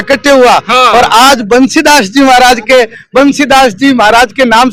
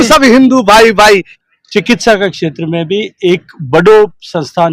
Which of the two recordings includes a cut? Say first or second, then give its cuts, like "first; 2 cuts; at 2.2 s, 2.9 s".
second; 1 cut; at 1.3 s